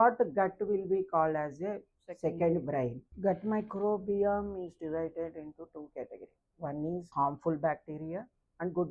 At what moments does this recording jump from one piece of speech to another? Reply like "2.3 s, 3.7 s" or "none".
3.1 s, 7.1 s